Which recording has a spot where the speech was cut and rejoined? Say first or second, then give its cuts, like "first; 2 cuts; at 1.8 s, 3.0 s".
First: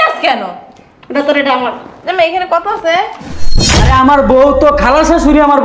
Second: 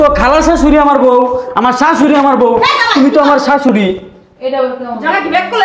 first; 1 cut; at 3.6 s